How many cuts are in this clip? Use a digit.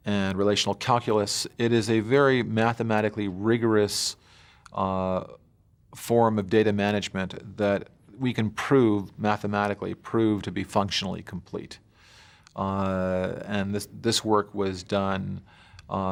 0